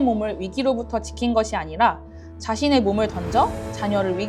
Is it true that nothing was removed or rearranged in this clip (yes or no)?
yes